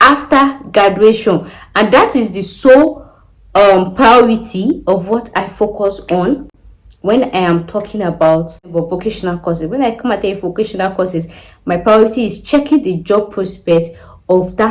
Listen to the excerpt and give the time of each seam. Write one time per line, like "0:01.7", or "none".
0:08.7